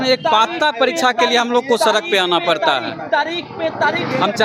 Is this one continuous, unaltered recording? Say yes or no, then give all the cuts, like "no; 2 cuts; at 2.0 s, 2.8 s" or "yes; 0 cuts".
yes; 0 cuts